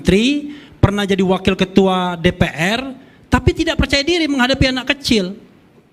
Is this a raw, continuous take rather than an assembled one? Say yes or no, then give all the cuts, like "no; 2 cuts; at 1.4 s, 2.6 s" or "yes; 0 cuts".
yes; 0 cuts